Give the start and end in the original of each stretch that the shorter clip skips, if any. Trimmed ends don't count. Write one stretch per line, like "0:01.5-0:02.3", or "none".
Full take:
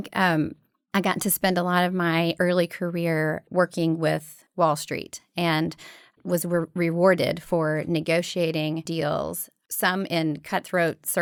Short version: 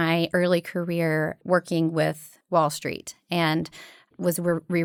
none